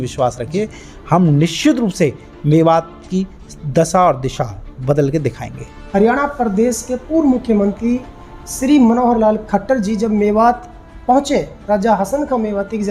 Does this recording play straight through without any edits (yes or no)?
no